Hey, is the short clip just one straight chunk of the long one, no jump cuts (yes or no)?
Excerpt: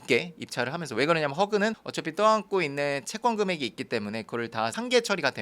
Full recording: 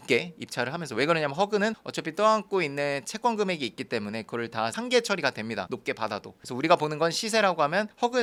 yes